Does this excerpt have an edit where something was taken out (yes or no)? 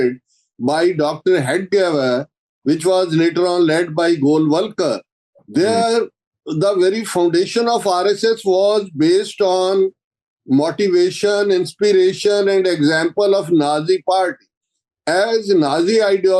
no